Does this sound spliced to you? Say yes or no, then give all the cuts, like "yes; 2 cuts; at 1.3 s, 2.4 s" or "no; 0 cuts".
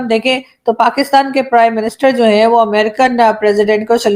no; 0 cuts